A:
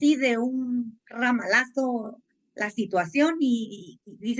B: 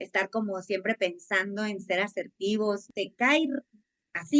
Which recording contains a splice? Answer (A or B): B